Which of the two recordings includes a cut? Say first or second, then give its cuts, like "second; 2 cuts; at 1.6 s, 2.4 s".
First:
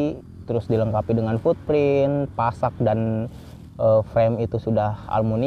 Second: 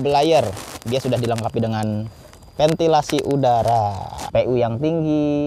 second; 1 cut; at 4.1 s